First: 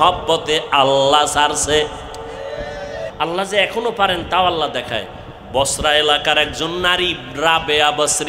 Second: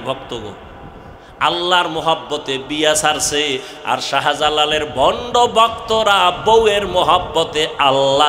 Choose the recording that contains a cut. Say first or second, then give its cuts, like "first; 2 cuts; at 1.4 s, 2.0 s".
first; 1 cut; at 3.1 s